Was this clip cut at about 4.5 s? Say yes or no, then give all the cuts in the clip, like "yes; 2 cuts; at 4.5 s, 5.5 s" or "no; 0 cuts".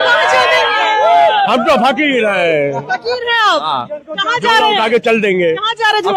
no; 0 cuts